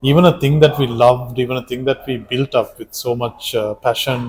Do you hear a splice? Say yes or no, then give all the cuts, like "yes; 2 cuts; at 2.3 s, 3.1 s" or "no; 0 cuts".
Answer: no; 0 cuts